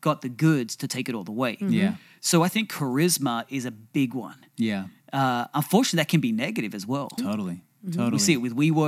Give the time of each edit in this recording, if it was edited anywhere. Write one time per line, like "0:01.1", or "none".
0:07.2